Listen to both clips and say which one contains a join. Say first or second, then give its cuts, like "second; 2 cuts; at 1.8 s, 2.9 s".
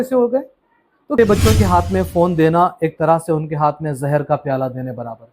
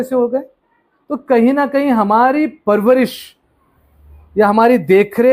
first; 1 cut; at 1.2 s